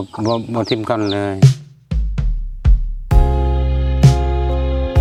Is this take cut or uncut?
uncut